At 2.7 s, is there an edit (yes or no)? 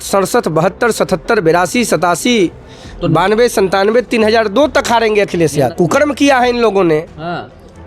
no